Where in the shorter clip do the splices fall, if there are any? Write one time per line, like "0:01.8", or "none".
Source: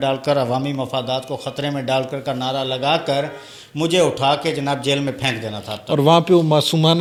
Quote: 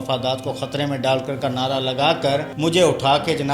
0:02.5